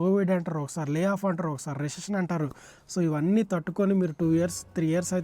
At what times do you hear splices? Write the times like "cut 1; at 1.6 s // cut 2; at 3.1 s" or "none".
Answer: none